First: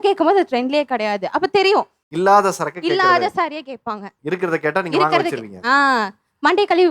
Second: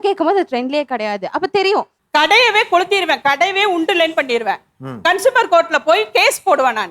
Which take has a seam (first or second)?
second